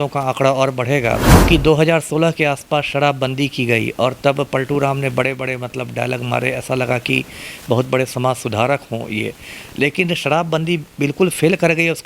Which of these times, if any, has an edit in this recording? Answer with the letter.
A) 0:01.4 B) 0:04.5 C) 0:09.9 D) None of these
A